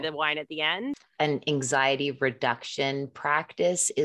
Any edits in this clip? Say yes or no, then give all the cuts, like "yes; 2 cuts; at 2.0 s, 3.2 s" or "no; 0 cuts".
yes; 1 cut; at 1.0 s